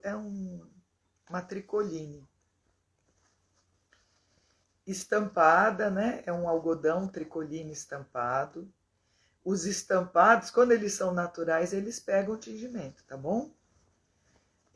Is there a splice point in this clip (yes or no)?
no